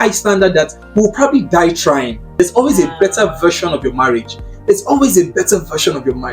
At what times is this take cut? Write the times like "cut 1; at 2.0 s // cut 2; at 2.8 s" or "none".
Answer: cut 1; at 2.4 s